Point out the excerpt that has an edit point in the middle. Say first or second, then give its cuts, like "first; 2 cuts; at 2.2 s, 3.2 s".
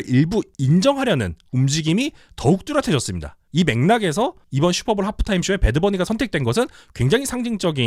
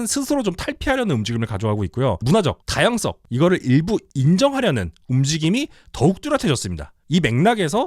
second; 1 cut; at 2.2 s